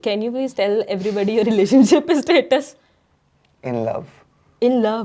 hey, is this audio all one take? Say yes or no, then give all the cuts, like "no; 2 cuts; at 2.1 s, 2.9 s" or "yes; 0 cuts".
yes; 0 cuts